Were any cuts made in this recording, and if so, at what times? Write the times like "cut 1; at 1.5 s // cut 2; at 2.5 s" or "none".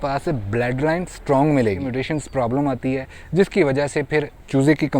cut 1; at 1.9 s